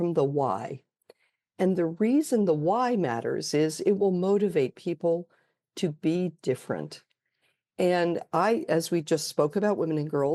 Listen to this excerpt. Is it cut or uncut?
uncut